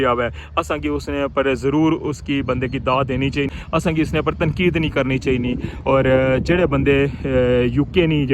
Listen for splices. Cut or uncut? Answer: cut